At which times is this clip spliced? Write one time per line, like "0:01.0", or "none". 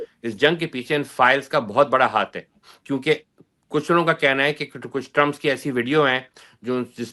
none